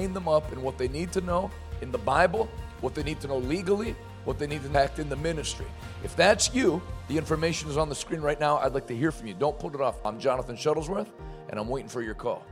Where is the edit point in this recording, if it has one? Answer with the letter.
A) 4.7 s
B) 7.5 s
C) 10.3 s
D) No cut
A